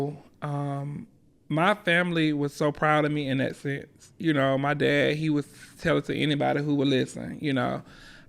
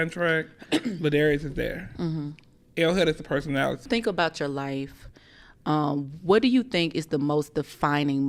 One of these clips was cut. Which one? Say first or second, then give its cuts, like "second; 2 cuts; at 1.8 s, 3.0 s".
second; 1 cut; at 3.9 s